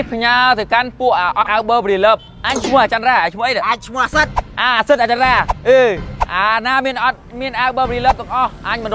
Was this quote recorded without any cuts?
no; 2 cuts; at 1.4 s, 6.1 s

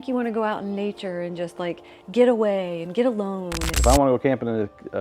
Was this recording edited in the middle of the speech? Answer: yes; 1 cut; at 3.8 s

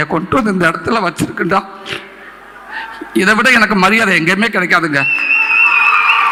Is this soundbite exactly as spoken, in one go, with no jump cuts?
yes; 0 cuts

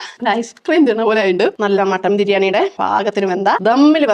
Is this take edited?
yes; 1 cut; at 1.5 s

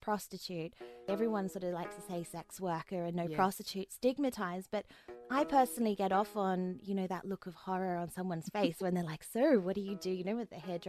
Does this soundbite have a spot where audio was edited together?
yes; 1 cut; at 1.1 s

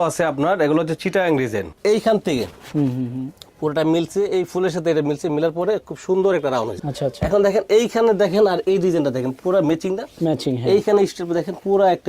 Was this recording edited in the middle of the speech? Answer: yes; 2 cuts; at 1.7 s, 6.7 s

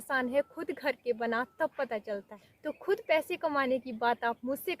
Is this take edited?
yes; 1 cut; at 2.3 s

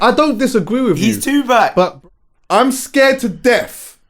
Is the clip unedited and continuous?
no; 1 cut; at 2.0 s

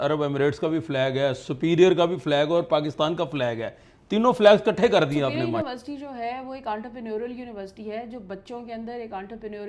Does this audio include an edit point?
yes; 1 cut; at 5.6 s

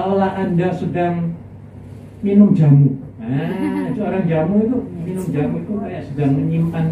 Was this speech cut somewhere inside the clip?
no; 0 cuts

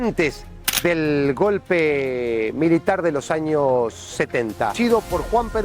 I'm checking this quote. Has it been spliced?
yes; 1 cut; at 4.7 s

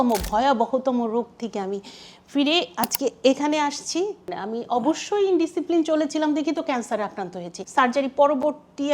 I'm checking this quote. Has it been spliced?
yes; 2 cuts; at 4.3 s, 7.6 s

